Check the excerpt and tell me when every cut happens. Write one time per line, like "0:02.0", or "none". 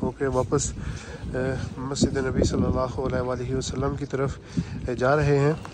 none